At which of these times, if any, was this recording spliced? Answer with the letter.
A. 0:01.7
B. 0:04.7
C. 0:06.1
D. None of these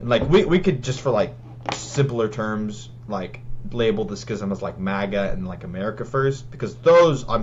D